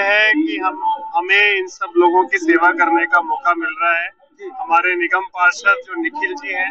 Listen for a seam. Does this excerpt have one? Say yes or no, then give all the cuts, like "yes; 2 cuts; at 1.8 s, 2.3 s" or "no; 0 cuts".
no; 0 cuts